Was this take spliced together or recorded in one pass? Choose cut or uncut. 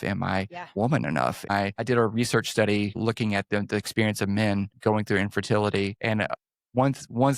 cut